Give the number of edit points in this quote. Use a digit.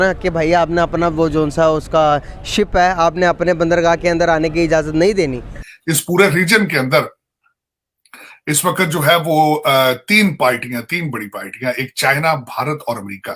1